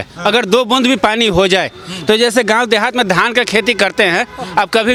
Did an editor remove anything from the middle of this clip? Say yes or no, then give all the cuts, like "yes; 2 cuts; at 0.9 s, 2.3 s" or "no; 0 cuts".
no; 0 cuts